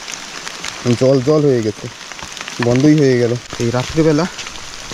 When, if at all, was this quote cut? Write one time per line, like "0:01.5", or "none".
0:03.5